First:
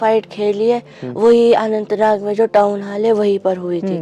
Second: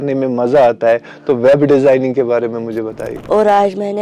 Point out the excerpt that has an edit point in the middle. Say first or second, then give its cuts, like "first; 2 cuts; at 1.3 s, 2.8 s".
second; 1 cut; at 3.1 s